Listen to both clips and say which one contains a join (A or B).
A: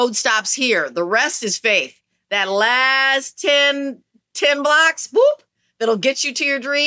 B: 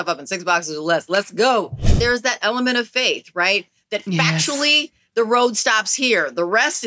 B